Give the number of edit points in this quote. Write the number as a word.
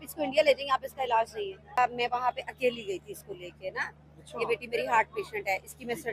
one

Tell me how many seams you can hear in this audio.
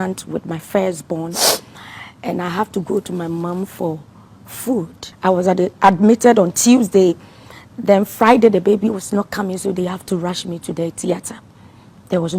one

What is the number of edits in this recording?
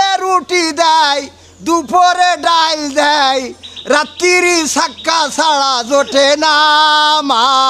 zero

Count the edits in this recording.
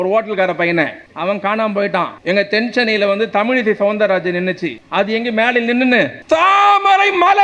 four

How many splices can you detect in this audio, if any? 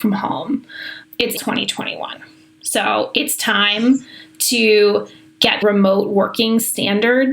one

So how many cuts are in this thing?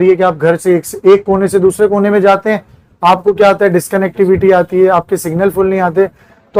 zero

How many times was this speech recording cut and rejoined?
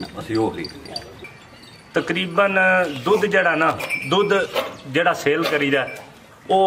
one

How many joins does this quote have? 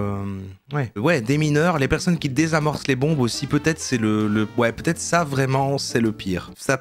one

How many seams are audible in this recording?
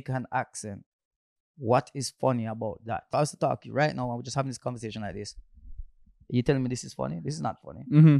one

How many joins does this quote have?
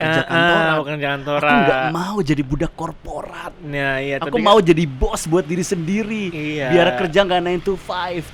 zero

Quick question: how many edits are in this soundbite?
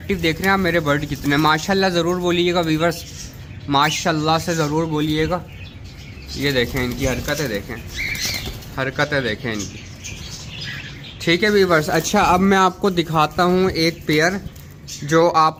zero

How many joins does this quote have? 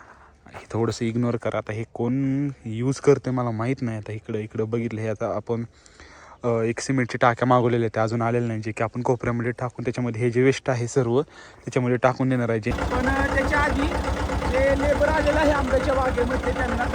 one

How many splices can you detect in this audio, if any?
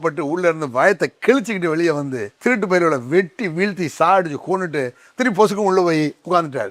one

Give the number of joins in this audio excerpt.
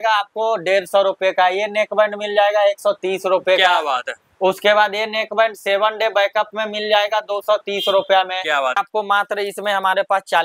one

